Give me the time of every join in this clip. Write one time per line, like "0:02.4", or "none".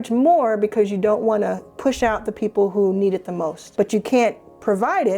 0:01.7
0:03.6

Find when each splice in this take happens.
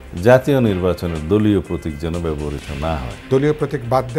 0:03.1

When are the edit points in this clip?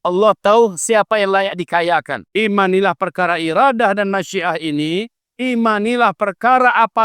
0:02.2

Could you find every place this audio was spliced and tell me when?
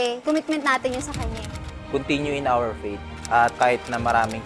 0:01.7
0:03.5

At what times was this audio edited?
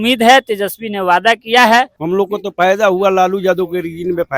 0:02.0

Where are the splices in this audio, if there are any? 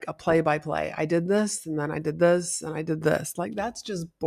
none

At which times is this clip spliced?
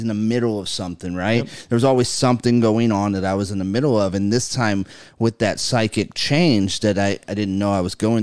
none

